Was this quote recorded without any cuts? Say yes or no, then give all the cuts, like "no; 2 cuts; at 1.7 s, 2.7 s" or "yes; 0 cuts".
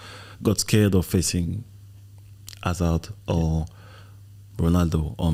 yes; 0 cuts